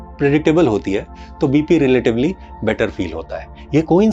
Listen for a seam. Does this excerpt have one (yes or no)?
no